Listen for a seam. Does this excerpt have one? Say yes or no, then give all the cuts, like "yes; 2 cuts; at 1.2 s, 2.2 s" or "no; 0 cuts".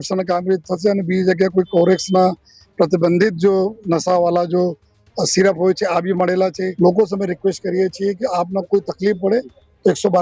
yes; 1 cut; at 6.7 s